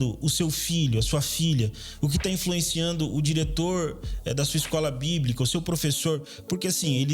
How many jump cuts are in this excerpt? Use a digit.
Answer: 0